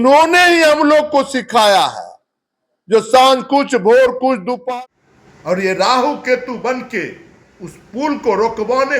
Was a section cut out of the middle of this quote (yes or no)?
yes